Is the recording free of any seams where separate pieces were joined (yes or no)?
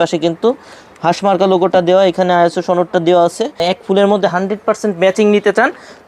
no